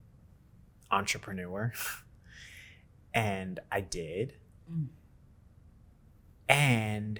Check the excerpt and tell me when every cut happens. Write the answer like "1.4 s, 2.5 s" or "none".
none